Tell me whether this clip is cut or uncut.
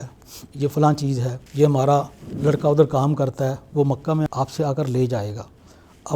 cut